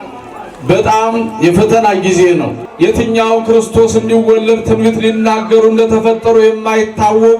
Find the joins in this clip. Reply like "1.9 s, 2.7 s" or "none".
2.6 s